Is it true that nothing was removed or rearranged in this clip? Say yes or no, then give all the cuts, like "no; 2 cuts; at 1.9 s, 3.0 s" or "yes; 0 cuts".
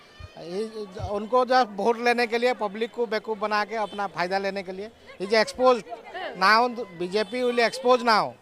yes; 0 cuts